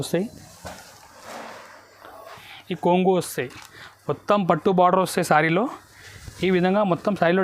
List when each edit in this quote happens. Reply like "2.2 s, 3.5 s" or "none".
2.5 s